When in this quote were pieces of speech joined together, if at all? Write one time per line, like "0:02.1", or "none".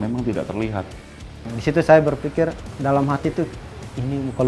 0:01.5
0:02.7